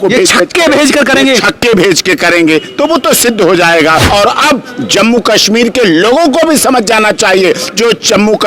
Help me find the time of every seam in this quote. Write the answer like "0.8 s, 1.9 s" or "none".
4.0 s